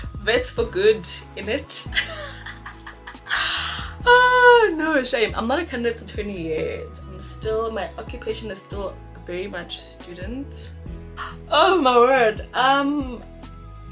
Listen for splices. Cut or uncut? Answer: uncut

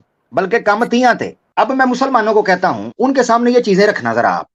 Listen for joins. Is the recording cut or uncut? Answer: cut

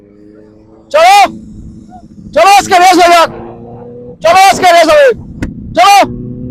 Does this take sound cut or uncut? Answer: uncut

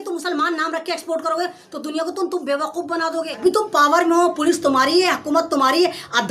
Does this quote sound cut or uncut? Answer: cut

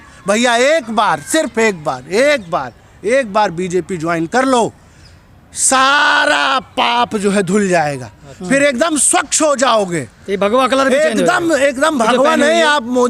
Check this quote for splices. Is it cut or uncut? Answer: uncut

